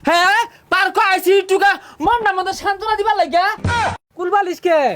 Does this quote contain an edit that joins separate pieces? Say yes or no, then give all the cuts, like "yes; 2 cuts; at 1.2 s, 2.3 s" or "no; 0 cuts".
yes; 1 cut; at 3.8 s